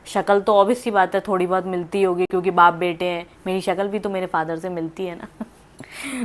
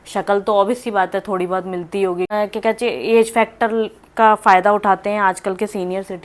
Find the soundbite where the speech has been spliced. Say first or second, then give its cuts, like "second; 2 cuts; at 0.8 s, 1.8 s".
second; 1 cut; at 2.3 s